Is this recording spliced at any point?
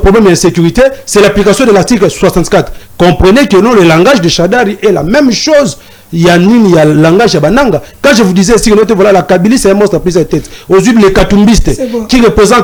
no; 0 cuts

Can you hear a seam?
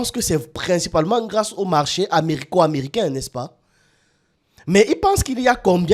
no; 0 cuts

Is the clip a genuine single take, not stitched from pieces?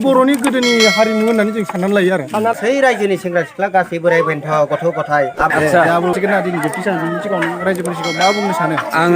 no; 3 cuts; at 2.5 s, 5.5 s, 6.1 s

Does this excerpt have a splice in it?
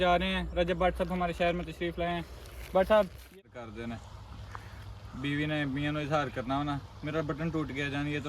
yes; 1 cut; at 3.5 s

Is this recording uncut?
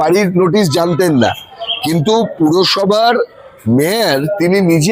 yes; 0 cuts

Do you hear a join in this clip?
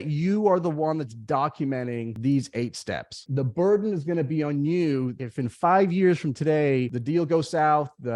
yes; 4 cuts; at 2.1 s, 3.2 s, 5.1 s, 7.0 s

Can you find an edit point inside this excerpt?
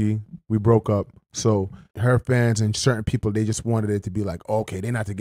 yes; 1 cut; at 1.8 s

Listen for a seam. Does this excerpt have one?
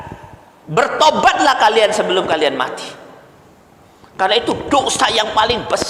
no; 0 cuts

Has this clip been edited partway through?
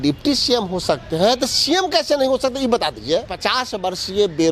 yes; 1 cut; at 3.4 s

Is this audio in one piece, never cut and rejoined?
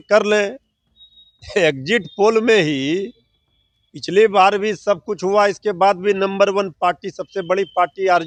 yes; 0 cuts

